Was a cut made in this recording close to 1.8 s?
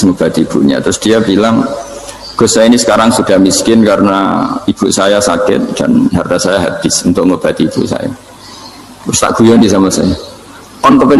no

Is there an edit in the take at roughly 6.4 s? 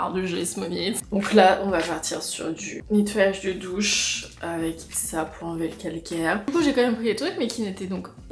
yes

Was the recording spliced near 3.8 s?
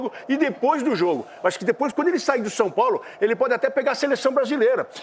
no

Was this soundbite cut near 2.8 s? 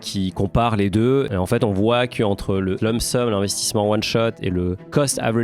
yes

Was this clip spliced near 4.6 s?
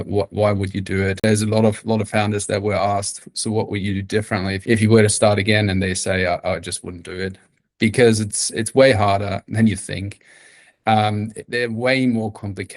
yes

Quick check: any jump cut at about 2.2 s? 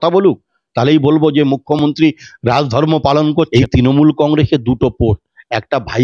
no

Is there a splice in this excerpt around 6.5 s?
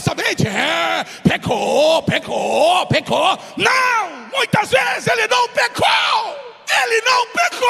yes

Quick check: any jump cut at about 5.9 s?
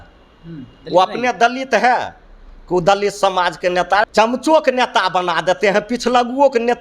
no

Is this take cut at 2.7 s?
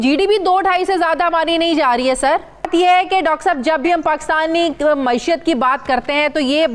yes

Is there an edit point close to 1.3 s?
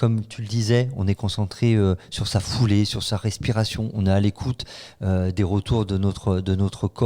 no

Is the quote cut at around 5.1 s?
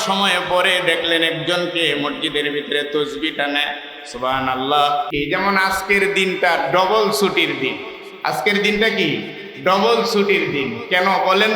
yes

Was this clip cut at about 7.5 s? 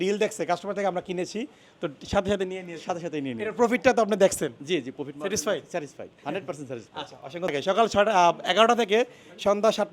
yes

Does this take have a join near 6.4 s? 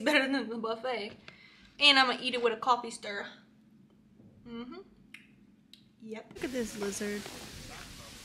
yes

